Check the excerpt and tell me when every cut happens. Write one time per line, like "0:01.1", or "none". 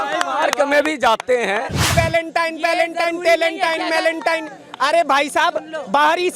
0:01.9